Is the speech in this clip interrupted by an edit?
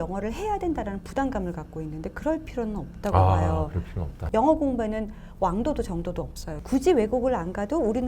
yes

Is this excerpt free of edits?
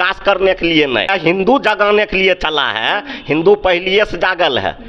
no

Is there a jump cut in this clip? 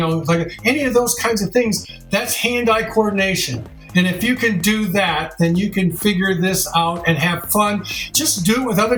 no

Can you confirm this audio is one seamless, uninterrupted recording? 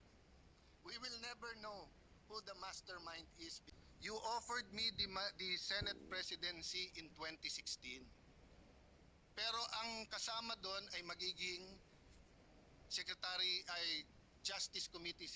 no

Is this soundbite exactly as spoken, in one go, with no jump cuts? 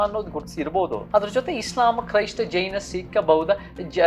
no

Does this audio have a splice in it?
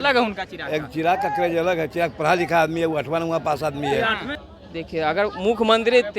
yes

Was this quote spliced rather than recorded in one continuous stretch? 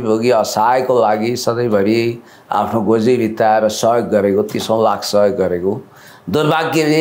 no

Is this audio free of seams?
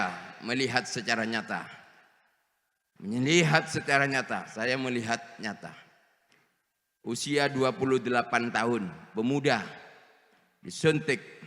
no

